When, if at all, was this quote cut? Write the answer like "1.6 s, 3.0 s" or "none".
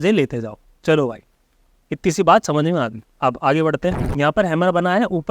4.0 s